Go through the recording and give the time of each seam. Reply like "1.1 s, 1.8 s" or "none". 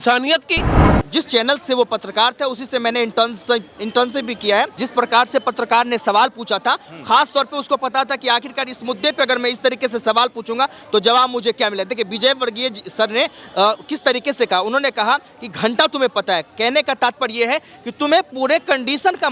1.0 s, 4.8 s